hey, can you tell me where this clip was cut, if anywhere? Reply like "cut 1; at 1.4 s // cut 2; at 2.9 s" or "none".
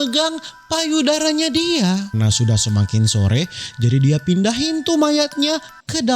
cut 1; at 2.1 s